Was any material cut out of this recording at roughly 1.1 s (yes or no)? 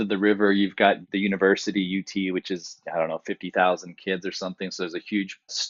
yes